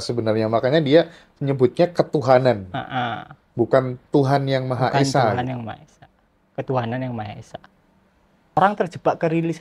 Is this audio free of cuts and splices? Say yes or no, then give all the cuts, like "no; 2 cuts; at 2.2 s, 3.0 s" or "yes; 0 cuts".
no; 1 cut; at 8.6 s